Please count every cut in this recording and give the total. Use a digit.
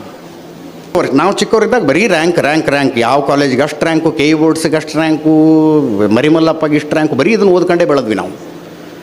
1